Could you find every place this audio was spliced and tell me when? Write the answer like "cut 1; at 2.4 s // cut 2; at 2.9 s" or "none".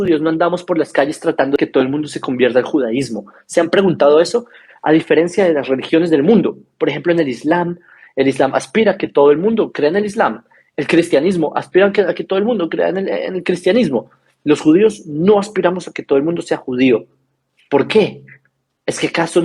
cut 1; at 1.6 s